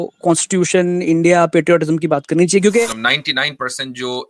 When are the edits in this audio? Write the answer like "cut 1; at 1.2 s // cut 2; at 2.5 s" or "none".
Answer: cut 1; at 3.0 s